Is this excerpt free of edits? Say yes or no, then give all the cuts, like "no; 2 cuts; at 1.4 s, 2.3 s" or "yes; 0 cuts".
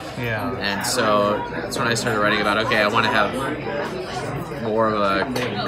yes; 0 cuts